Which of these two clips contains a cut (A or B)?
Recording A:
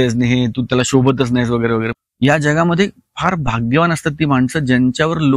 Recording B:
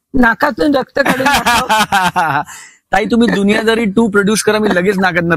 A